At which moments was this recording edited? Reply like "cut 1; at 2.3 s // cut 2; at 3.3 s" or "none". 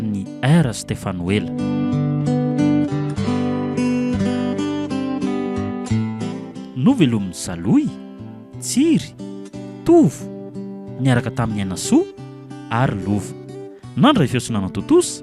cut 1; at 1.5 s